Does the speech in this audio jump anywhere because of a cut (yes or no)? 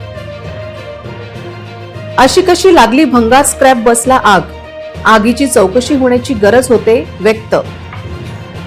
no